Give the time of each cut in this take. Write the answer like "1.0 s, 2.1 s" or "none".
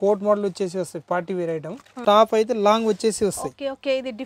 2.0 s